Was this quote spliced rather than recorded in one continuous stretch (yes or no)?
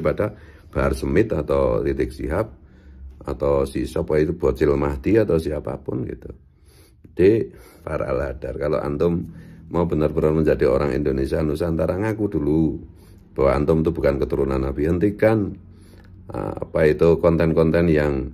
yes